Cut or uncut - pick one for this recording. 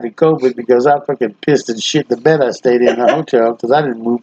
uncut